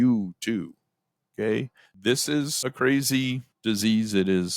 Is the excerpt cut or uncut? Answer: cut